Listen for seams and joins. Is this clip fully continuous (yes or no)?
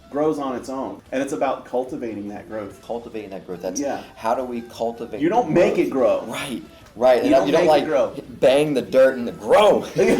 no